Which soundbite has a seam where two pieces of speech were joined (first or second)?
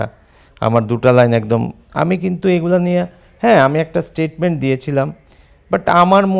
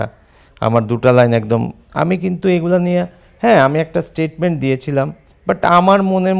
second